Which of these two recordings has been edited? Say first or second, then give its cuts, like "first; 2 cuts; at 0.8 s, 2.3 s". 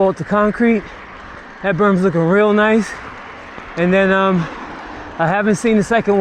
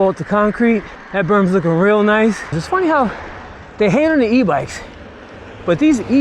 second; 2 cuts; at 1.0 s, 2.6 s